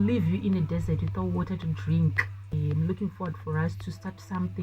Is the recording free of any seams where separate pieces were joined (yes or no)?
no